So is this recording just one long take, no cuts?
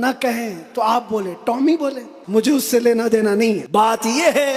no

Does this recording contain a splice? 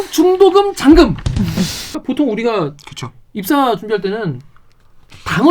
yes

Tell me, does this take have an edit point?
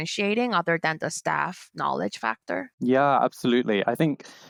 no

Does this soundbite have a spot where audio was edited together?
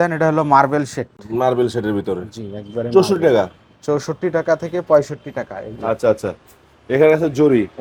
no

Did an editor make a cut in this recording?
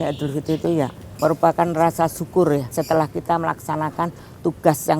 no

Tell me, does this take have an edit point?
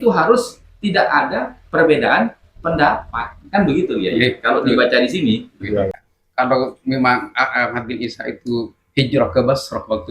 yes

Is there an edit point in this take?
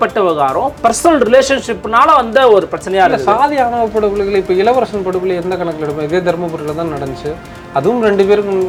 no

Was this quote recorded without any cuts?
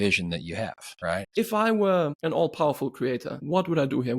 no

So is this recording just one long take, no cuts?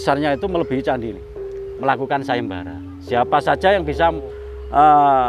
no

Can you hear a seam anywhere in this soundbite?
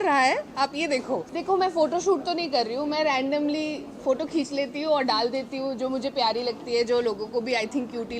yes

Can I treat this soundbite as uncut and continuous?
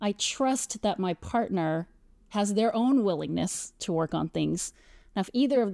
yes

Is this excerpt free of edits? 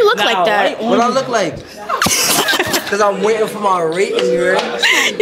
yes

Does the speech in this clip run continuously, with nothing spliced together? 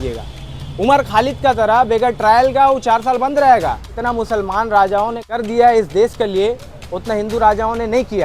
no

